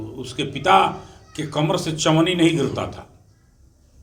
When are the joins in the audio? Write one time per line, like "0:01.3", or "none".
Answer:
none